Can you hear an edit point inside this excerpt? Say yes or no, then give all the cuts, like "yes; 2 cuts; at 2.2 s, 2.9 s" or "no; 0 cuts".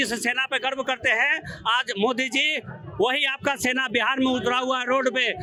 no; 0 cuts